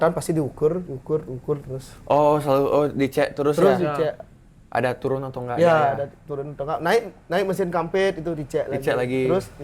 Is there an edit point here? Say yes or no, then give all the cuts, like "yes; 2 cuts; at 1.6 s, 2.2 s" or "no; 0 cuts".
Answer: no; 0 cuts